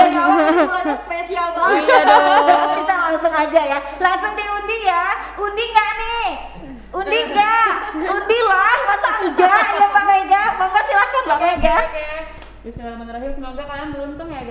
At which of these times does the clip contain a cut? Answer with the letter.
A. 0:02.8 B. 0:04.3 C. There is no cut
A